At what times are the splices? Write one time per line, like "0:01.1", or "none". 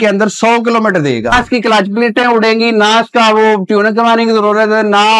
0:01.3